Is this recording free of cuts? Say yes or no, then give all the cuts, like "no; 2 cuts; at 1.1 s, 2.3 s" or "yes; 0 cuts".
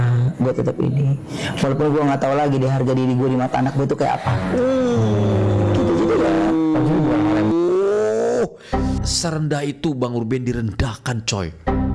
yes; 0 cuts